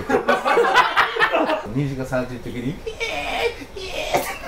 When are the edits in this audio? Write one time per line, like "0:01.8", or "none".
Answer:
0:01.6